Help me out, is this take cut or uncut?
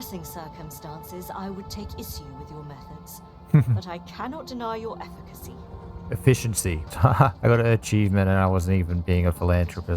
cut